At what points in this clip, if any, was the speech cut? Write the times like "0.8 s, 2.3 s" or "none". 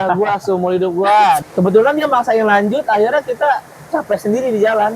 1.4 s